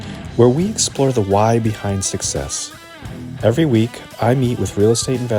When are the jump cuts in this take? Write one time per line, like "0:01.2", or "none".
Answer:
none